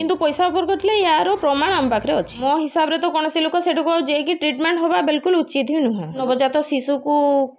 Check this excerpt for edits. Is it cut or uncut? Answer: cut